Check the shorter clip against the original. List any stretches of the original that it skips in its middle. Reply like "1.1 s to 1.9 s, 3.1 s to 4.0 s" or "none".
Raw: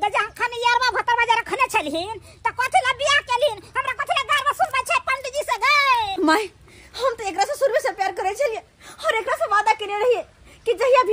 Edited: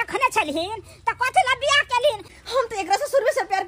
3.7 s to 6.8 s